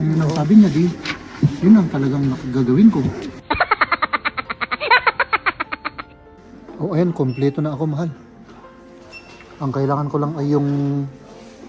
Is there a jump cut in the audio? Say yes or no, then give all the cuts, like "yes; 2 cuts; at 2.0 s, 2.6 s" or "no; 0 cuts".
yes; 2 cuts; at 3.3 s, 6.5 s